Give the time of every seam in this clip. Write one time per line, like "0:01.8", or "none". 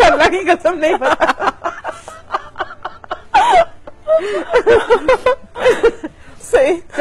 0:01.9